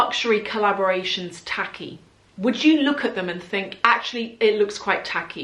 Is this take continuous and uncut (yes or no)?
yes